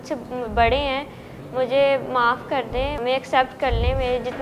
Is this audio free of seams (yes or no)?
no